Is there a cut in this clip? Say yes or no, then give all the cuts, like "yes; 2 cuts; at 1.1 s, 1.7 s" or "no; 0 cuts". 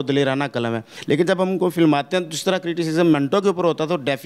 yes; 1 cut; at 0.9 s